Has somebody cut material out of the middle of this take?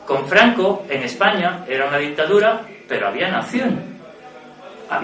no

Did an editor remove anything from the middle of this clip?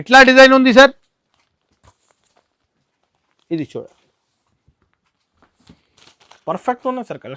no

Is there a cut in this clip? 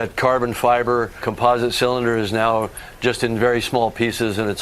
yes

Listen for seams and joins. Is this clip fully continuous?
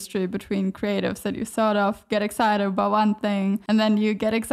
no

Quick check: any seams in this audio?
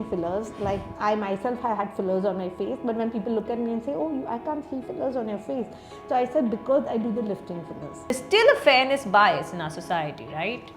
yes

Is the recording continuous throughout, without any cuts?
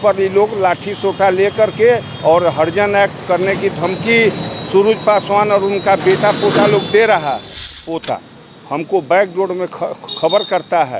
no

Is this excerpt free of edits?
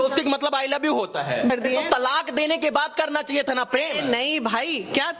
no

